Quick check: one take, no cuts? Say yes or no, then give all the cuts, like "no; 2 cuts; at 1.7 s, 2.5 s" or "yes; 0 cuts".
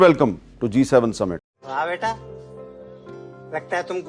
no; 1 cut; at 1.5 s